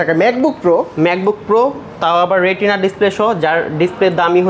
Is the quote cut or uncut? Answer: uncut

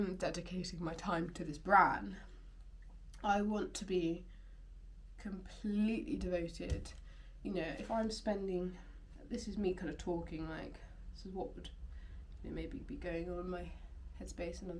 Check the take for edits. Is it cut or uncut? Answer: uncut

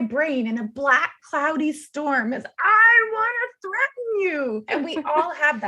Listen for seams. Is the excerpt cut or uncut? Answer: cut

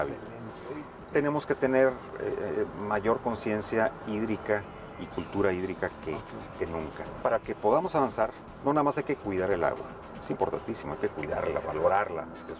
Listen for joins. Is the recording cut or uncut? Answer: cut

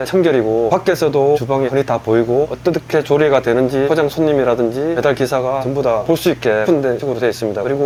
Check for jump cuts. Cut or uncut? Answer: uncut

